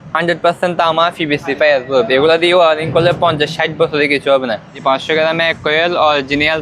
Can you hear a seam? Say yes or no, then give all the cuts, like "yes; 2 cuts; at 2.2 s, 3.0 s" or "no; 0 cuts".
yes; 1 cut; at 4.8 s